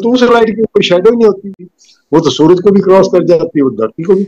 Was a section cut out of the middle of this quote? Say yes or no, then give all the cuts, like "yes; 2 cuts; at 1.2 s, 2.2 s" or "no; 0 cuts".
yes; 1 cut; at 1.6 s